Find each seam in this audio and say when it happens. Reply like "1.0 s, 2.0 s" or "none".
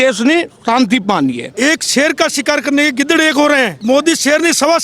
1.5 s, 3.8 s